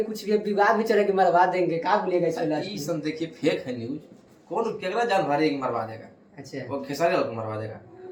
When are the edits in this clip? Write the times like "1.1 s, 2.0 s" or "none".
none